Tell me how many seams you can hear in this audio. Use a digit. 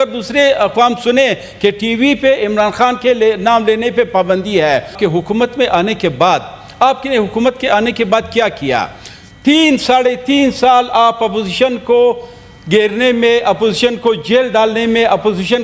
1